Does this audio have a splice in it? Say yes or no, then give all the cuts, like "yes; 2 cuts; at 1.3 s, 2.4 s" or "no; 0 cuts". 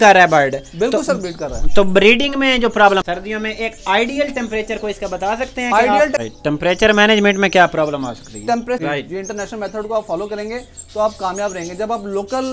yes; 3 cuts; at 3.0 s, 6.2 s, 8.8 s